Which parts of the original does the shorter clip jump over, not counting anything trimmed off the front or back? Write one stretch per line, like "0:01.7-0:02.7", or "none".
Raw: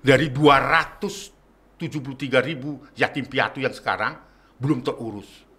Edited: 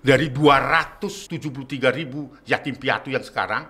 0:01.2-0:01.8